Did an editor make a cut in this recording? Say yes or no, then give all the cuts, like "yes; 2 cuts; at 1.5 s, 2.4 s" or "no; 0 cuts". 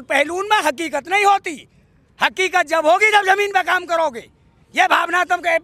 no; 0 cuts